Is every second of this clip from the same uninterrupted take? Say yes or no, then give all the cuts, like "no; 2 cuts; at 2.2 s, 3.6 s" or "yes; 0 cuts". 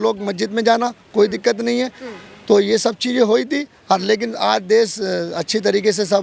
yes; 0 cuts